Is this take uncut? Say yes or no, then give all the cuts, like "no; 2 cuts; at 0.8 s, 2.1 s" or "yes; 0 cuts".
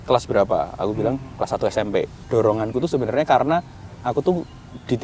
no; 1 cut; at 2.2 s